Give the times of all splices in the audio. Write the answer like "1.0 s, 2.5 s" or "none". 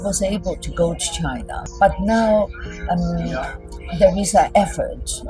1.6 s

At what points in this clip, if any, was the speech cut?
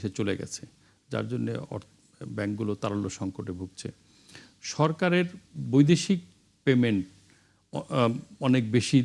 none

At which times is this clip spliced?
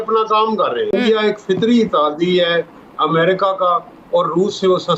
0.9 s

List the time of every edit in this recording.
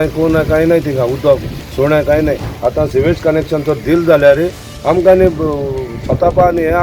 2.5 s

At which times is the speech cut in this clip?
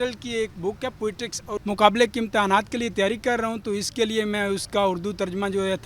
1.6 s

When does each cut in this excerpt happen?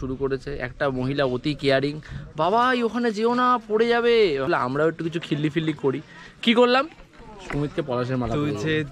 4.5 s

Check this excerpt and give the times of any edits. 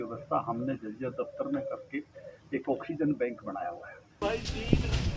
4.2 s

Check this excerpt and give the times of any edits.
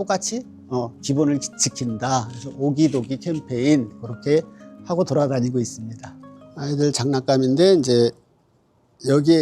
none

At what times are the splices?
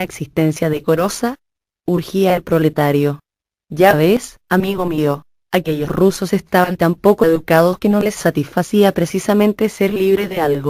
6.9 s

